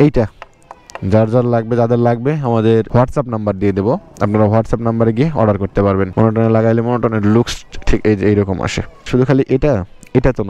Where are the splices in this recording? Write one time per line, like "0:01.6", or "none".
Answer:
0:02.9
0:06.1
0:09.1